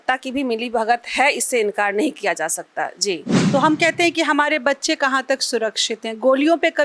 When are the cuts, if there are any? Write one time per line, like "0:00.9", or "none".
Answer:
0:03.3